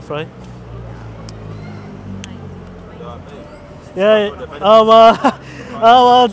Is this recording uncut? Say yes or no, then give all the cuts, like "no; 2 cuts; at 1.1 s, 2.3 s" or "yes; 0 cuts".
yes; 0 cuts